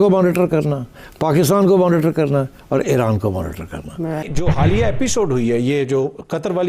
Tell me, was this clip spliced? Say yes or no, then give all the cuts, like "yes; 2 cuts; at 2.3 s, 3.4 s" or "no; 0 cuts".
yes; 1 cut; at 4.3 s